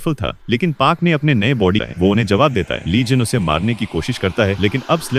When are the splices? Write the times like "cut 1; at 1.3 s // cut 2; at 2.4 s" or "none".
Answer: cut 1; at 1.8 s